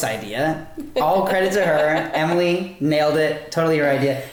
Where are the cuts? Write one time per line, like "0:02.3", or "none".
none